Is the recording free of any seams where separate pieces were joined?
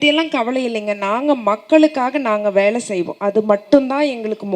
no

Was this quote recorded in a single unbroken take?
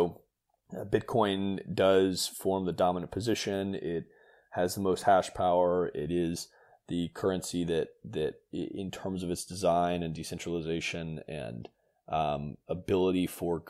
yes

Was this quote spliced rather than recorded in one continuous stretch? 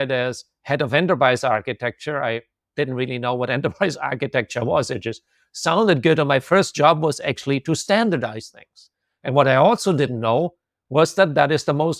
no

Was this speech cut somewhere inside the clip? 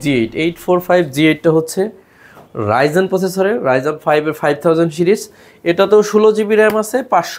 no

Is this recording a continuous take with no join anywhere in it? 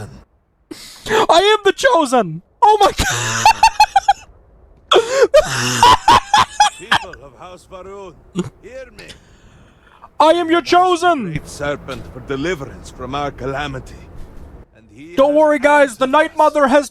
yes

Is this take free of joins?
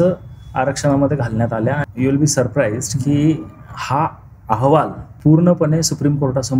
no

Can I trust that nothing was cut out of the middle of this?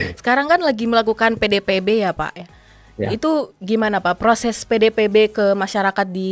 yes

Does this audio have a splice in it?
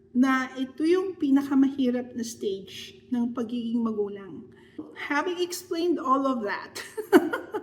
yes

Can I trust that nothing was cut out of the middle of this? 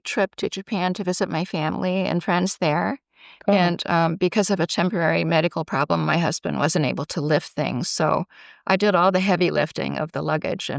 yes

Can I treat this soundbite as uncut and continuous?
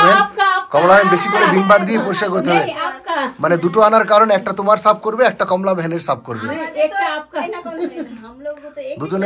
yes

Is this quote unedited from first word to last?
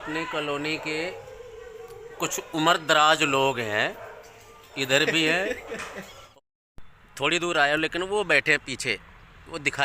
no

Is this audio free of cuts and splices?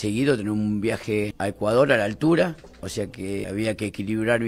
no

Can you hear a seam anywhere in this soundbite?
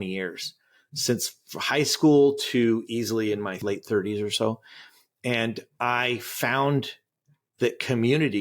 yes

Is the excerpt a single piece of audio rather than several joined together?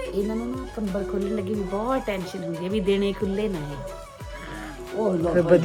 yes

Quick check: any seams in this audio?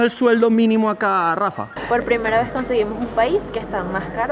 yes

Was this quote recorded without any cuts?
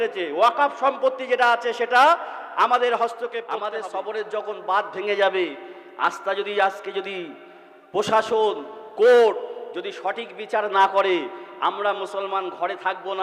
no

